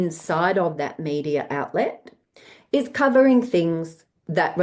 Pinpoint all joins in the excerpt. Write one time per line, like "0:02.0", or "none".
none